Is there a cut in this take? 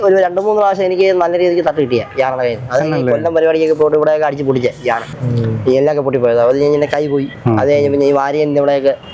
no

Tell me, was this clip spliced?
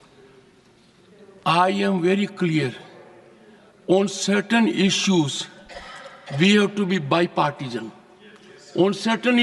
no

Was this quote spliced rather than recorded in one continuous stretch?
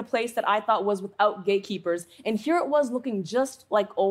no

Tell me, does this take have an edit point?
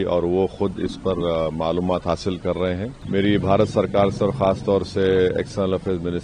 yes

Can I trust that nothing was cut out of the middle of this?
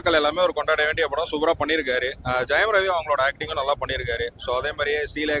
yes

